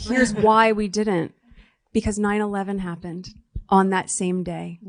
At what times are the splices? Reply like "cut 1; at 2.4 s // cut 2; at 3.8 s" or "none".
cut 1; at 3.6 s

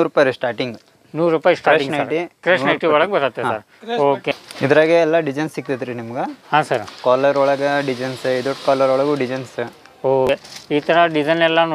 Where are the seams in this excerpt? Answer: cut 1; at 4.3 s // cut 2; at 10.3 s

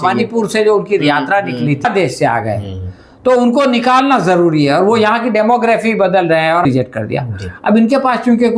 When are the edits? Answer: cut 1; at 1.8 s // cut 2; at 6.6 s

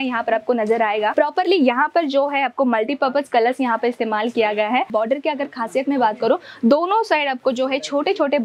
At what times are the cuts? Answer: cut 1; at 1.1 s // cut 2; at 4.9 s

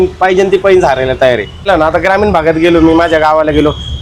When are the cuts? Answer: cut 1; at 1.7 s

